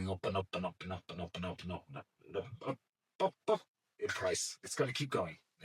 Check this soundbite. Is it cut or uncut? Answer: uncut